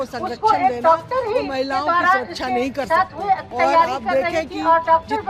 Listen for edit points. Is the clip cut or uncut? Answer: cut